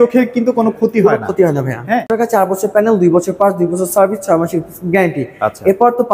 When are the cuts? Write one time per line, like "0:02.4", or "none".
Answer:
0:02.1

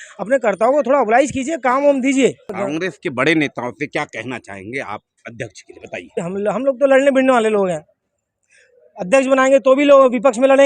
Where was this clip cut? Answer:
0:02.5
0:06.1

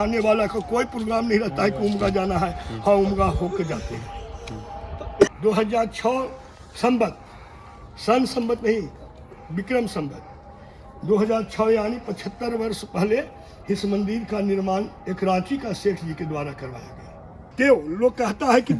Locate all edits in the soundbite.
0:05.3
0:17.5

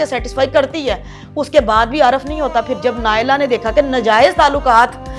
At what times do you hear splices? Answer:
none

